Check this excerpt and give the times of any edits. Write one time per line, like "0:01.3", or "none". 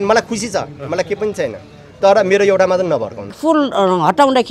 0:03.4